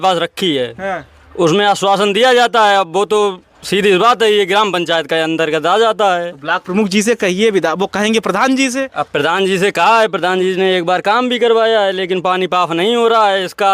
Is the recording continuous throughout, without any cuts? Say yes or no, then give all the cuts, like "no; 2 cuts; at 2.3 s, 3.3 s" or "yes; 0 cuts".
yes; 0 cuts